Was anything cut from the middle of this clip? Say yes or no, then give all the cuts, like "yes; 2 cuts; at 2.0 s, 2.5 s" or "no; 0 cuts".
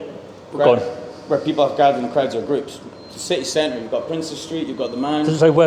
no; 0 cuts